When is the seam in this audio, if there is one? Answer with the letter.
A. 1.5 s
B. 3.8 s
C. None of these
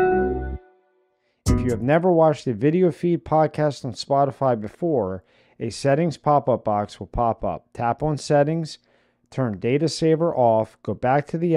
A